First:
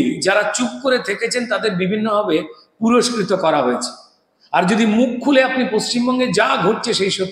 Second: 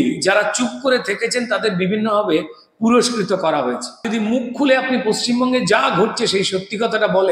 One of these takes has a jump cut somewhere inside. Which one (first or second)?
second